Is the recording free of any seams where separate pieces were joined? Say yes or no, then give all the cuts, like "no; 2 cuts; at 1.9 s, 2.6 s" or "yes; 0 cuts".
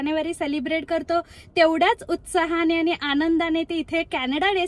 yes; 0 cuts